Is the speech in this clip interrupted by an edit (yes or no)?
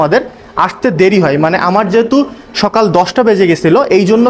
no